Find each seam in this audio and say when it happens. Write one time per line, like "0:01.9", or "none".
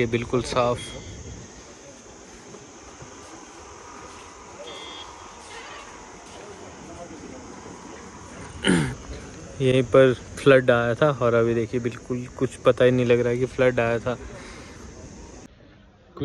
none